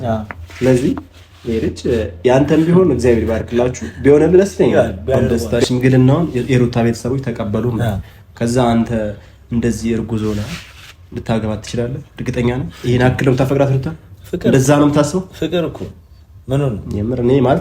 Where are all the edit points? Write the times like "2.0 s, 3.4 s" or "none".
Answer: 5.4 s